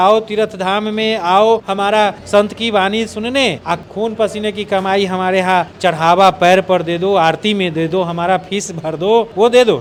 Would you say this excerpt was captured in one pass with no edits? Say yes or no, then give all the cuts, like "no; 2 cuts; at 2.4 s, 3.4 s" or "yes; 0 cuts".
yes; 0 cuts